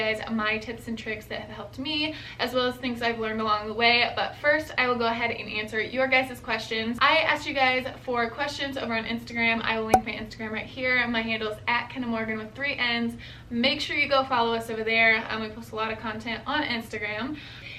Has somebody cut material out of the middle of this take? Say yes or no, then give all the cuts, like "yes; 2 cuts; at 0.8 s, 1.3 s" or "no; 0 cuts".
no; 0 cuts